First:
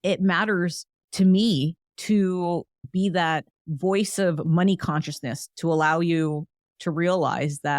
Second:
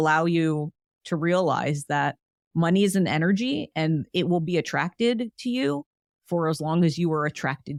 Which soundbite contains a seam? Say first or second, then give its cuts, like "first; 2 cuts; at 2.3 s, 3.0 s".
first; 3 cuts; at 1.9 s, 2.8 s, 3.6 s